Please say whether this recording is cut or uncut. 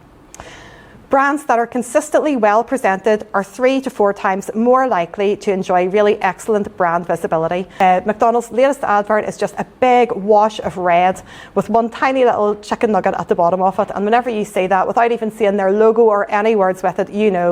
cut